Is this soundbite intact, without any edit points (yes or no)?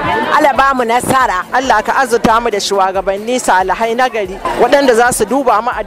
no